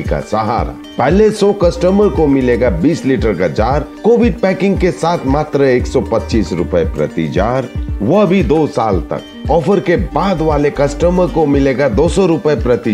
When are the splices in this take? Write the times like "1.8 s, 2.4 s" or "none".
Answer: none